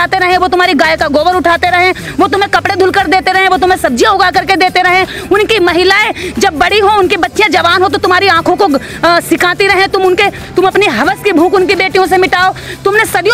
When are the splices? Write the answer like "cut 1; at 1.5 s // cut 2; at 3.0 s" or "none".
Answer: none